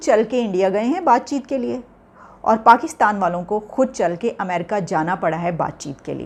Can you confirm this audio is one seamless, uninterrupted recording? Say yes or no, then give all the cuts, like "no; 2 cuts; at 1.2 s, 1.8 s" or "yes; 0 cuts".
yes; 0 cuts